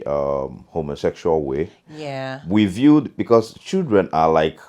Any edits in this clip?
no; 0 cuts

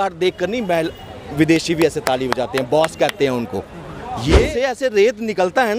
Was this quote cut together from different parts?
yes; 1 cut; at 4.6 s

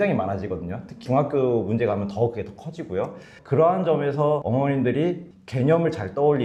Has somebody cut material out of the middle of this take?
no; 0 cuts

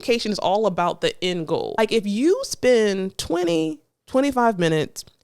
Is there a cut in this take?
yes; 1 cut; at 1.7 s

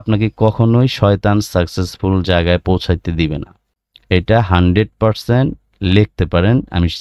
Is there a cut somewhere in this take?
no; 0 cuts

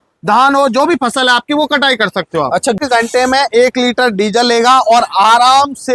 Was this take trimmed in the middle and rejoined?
yes; 1 cut; at 2.8 s

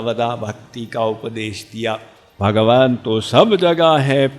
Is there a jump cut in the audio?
yes; 1 cut; at 2.3 s

